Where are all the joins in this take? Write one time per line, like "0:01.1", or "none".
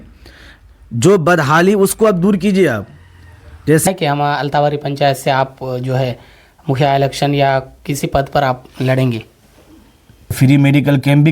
0:03.8
0:10.4